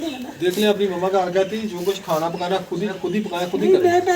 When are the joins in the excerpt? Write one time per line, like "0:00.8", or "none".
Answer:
0:03.0